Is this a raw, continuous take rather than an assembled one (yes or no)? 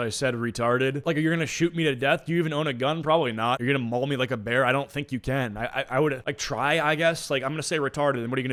yes